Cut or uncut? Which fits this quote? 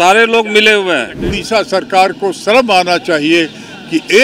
cut